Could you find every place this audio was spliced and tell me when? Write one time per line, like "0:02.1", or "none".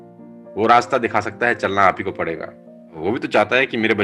0:03.0